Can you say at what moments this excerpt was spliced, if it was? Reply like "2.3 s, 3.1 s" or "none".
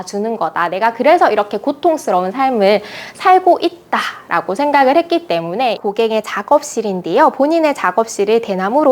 5.8 s